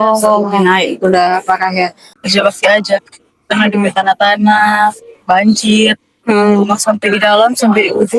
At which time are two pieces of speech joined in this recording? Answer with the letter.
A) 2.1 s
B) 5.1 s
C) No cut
A